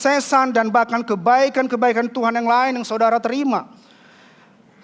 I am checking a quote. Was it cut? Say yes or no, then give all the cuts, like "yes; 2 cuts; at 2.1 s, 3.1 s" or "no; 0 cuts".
no; 0 cuts